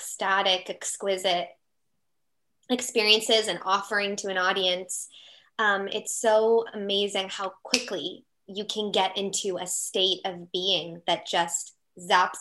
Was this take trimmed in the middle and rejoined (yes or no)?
no